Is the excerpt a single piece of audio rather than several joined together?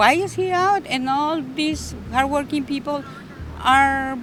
yes; 0 cuts

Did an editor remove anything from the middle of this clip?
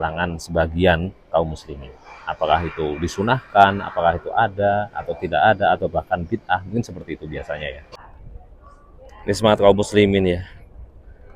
yes; 1 cut; at 7.9 s

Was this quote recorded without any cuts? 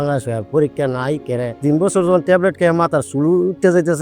yes; 0 cuts

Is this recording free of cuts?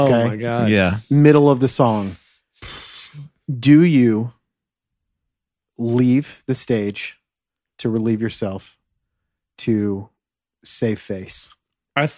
yes; 0 cuts

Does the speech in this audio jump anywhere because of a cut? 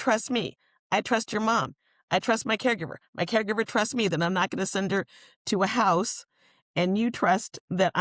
no; 0 cuts

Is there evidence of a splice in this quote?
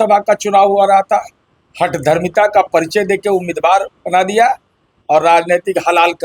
no; 0 cuts

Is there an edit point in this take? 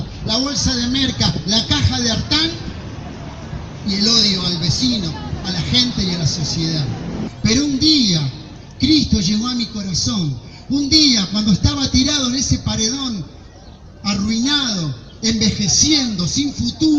yes; 1 cut; at 7.3 s

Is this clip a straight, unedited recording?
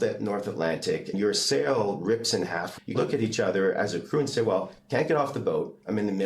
no; 2 cuts; at 1.1 s, 2.9 s

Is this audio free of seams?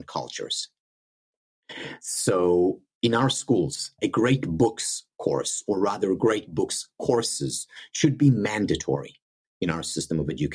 no; 1 cut; at 3.9 s

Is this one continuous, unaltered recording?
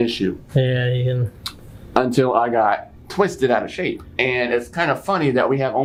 yes; 0 cuts

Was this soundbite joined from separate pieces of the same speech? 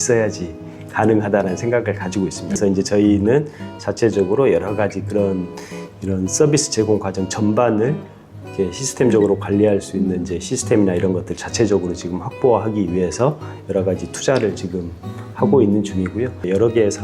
no; 0 cuts

